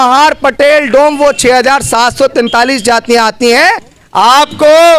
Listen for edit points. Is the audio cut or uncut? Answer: cut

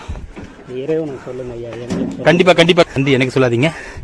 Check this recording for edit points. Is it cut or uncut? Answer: cut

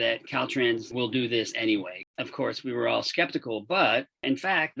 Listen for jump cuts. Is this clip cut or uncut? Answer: cut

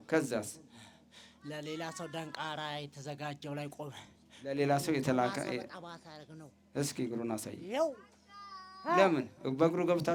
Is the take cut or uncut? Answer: uncut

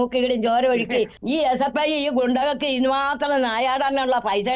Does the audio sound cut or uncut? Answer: cut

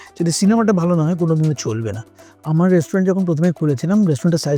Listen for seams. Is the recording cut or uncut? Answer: cut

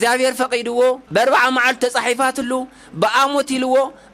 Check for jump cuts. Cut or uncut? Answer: cut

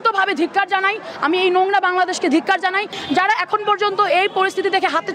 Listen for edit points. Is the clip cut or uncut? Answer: cut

